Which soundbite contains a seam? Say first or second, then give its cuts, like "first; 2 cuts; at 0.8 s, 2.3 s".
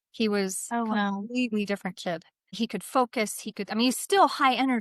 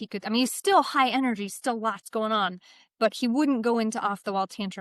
first; 1 cut; at 2.4 s